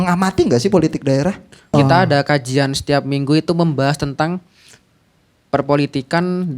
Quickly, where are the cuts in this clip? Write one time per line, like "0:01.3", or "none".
0:01.7